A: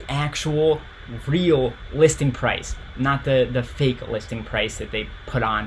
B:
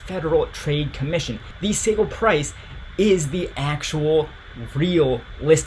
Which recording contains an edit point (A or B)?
B